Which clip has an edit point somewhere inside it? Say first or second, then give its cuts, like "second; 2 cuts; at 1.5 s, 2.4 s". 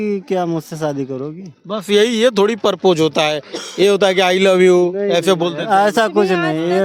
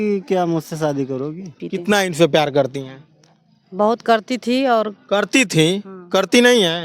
second; 1 cut; at 1.6 s